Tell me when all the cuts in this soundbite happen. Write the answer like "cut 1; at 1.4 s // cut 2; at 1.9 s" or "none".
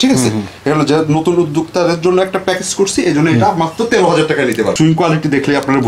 cut 1; at 4.7 s